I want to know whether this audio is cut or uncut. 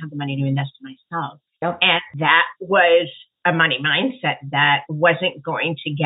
cut